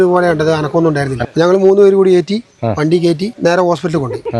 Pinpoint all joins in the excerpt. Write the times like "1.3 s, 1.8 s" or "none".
1.2 s, 3.3 s